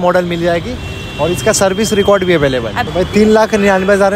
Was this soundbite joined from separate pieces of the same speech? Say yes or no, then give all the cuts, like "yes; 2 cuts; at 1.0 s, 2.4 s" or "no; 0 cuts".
yes; 1 cut; at 2.8 s